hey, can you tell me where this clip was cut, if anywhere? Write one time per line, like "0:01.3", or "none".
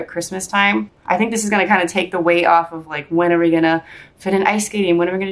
0:00.9

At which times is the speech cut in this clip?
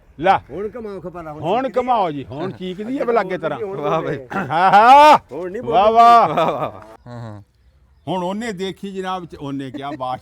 0:07.0

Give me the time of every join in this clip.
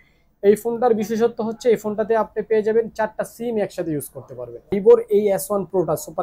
0:04.7

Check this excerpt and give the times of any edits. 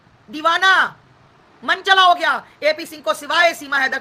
none

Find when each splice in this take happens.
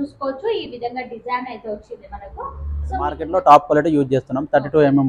0:03.2

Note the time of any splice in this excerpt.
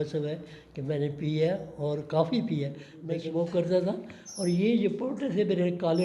0:02.9

